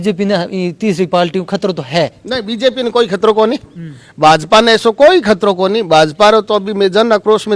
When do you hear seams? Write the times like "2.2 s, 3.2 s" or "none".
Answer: none